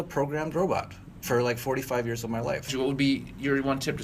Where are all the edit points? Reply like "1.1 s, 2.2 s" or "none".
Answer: 2.7 s